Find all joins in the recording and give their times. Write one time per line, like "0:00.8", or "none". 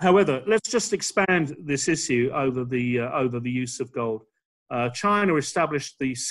none